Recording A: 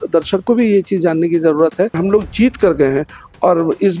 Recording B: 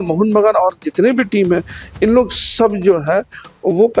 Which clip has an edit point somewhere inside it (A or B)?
A